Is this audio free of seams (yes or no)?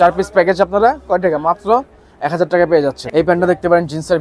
no